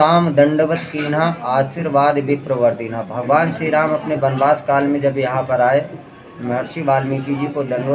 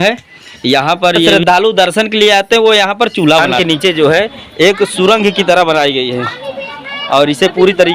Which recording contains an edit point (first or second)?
second